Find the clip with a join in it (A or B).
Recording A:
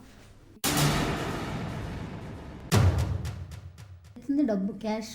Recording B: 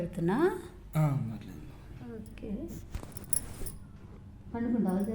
A